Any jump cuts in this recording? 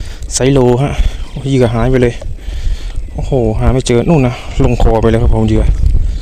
no; 0 cuts

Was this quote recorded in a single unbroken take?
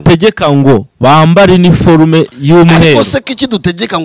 yes; 0 cuts

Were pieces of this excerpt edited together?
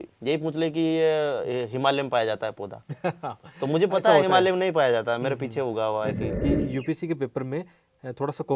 yes; 1 cut; at 6.4 s

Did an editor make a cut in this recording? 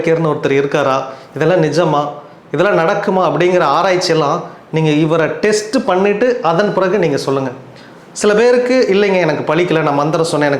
no; 0 cuts

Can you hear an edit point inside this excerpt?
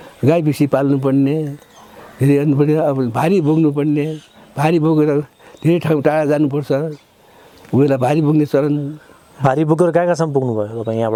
no; 0 cuts

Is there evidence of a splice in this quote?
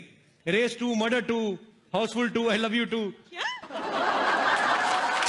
no; 0 cuts

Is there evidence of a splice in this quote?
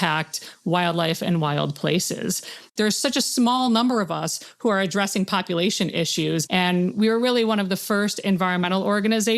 yes; 1 cut; at 2.6 s

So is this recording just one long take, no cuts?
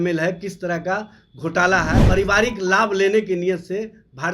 no; 1 cut; at 2.0 s

